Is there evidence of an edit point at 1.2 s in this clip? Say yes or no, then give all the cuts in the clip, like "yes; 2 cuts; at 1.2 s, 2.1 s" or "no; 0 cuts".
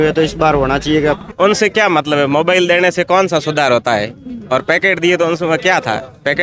yes; 1 cut; at 1.2 s